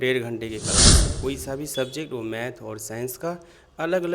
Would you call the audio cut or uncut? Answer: cut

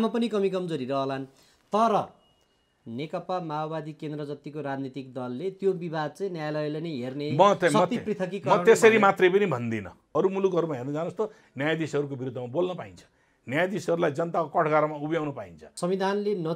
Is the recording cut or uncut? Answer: cut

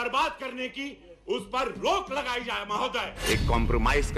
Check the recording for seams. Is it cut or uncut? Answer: cut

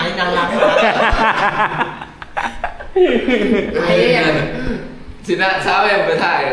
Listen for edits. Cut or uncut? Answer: uncut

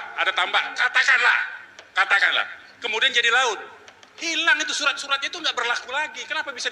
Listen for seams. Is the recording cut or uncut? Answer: uncut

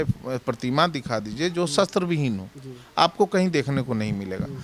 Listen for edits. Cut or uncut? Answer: uncut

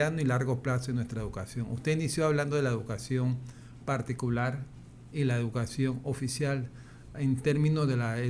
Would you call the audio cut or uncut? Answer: uncut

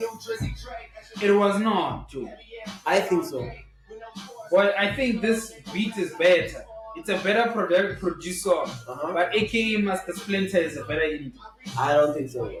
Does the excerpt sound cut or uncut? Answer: uncut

